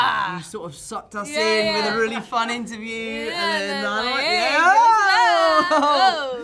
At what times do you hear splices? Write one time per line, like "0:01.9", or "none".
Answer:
none